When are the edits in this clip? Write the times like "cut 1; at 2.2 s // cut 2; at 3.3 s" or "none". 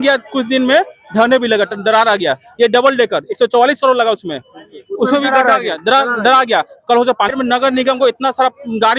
cut 1; at 7.3 s